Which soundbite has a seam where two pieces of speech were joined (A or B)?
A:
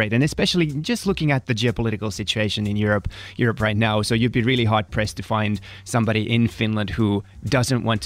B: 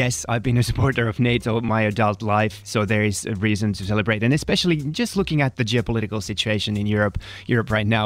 B